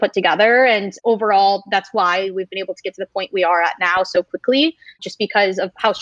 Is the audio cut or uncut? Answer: uncut